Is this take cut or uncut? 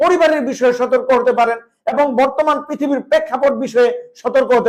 uncut